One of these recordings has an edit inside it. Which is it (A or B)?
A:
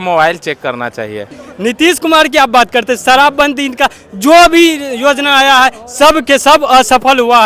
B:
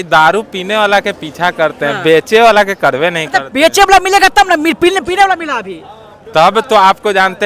A